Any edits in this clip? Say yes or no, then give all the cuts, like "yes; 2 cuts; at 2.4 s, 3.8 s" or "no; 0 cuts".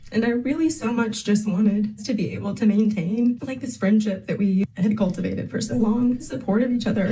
yes; 1 cut; at 6.0 s